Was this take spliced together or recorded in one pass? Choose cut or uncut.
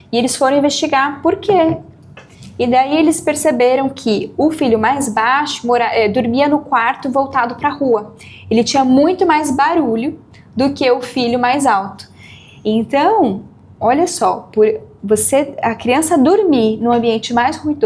uncut